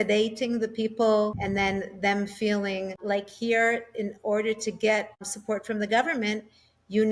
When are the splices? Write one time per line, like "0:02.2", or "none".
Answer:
0:01.4
0:03.0
0:05.3